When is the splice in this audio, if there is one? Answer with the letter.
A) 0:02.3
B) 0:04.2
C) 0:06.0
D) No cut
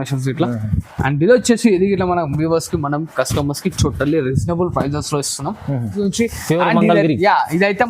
C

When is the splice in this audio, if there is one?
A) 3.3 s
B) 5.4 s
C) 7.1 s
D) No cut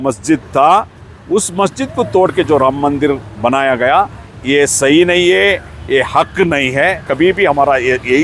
C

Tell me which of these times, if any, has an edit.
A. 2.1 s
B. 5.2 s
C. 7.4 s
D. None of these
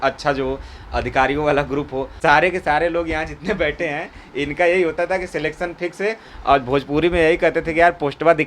A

